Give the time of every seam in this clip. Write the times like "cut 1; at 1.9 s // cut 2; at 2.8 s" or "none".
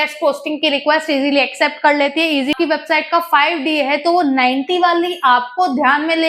cut 1; at 2.5 s